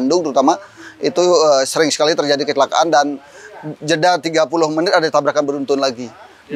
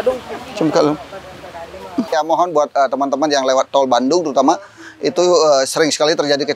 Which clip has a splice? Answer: second; 1 cut; at 2.1 s

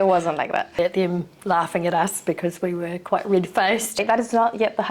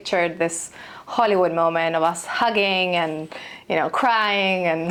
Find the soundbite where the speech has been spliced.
first; 2 cuts; at 0.8 s, 4.0 s

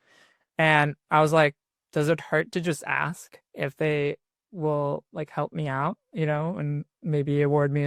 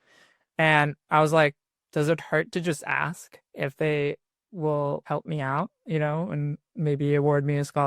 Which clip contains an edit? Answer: second; 1 cut; at 5.0 s

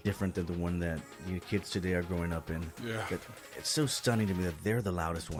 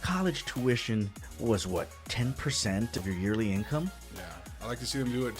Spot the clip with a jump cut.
second; 2 cuts; at 1.2 s, 2.9 s

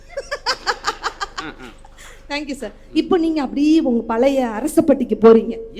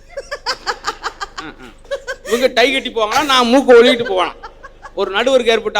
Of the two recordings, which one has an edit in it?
second; 1 cut; at 1.9 s

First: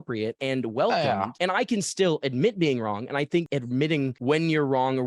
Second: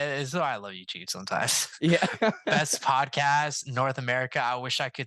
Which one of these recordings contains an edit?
first; 1 cut; at 1.3 s

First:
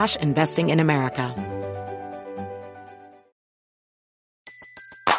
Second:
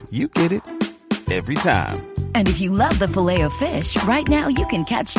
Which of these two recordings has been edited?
first; 1 cut; at 1.3 s

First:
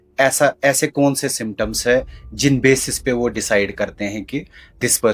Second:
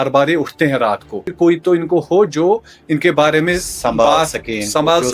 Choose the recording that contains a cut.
second; 1 cut; at 1.2 s

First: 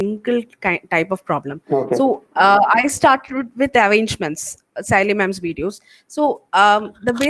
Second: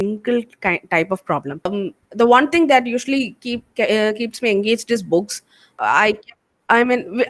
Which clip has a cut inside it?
second; 2 cuts; at 1.7 s, 5.7 s

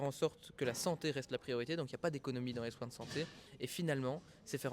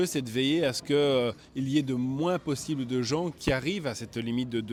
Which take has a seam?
first; 1 cut; at 3.4 s

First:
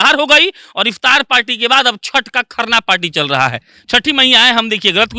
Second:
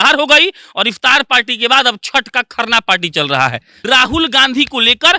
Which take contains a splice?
second; 1 cut; at 3.7 s

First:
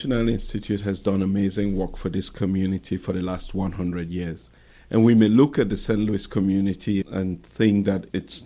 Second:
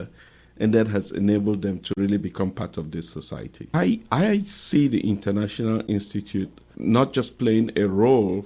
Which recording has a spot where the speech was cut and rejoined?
second; 2 cuts; at 3.7 s, 6.7 s

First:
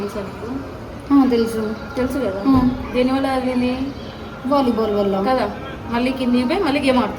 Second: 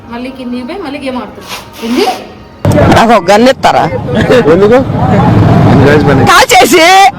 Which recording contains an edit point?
second; 1 cut; at 2.5 s

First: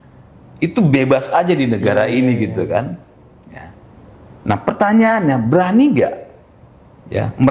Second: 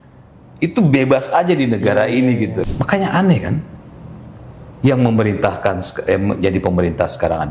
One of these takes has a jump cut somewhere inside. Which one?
second; 1 cut; at 2.7 s

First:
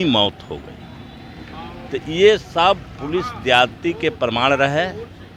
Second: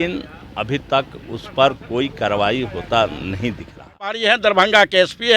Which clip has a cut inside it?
second; 1 cut; at 4.2 s

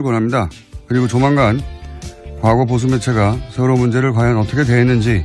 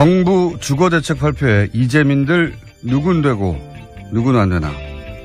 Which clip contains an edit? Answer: first; 1 cut; at 1.7 s

